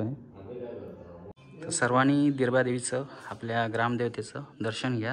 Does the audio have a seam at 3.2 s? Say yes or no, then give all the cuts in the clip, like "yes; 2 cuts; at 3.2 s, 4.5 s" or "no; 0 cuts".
no; 1 cut; at 1.4 s